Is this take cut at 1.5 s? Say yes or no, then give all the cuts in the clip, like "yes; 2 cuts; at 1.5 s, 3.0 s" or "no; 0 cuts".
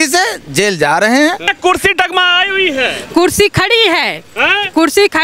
yes; 1 cut; at 1.5 s